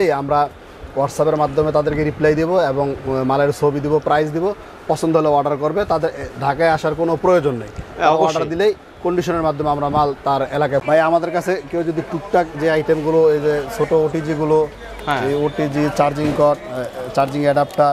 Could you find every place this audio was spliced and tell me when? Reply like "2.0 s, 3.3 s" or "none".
10.8 s